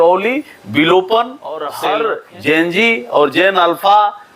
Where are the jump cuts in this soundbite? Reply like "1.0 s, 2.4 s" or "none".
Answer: 1.7 s